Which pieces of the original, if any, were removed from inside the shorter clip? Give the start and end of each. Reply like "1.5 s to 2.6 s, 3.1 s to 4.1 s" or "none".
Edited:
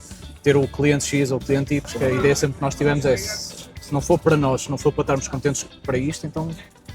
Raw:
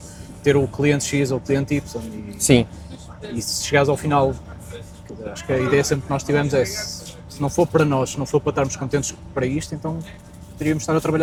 1.9 s to 5.4 s